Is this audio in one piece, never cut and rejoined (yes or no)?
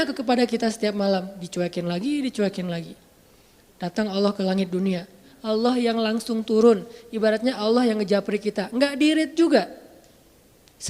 no